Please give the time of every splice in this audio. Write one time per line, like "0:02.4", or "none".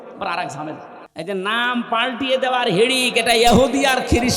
0:01.0